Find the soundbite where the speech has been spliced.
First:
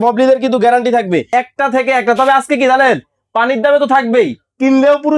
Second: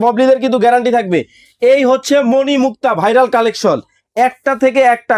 first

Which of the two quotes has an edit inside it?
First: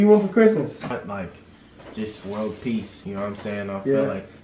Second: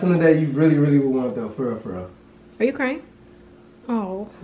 first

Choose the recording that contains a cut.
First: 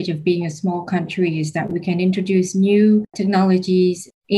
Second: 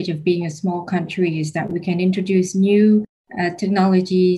first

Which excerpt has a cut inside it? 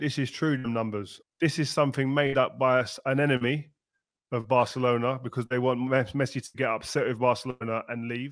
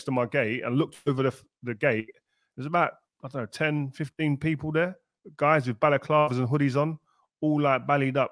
first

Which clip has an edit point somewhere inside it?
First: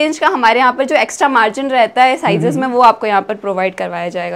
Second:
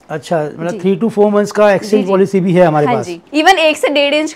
second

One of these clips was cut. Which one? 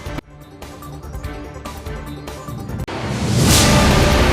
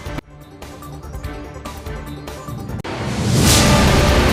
first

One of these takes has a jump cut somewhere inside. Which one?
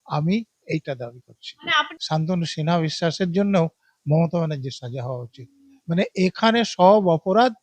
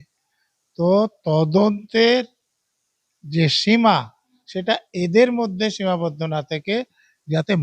first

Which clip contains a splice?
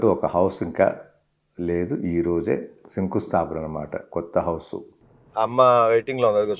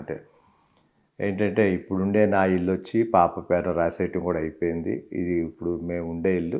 first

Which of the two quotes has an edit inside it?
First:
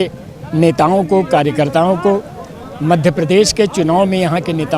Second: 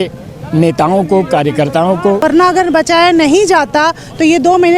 second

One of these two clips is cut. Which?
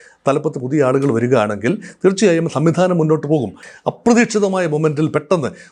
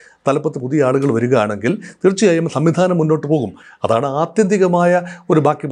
first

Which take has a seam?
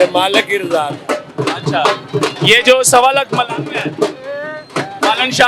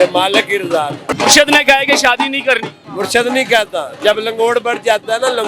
second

